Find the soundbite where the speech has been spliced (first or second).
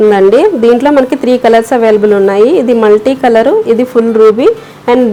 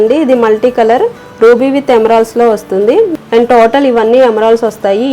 second